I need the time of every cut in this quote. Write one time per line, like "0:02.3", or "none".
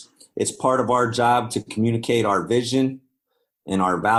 none